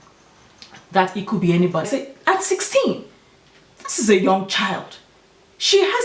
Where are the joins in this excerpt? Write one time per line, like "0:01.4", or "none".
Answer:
0:01.9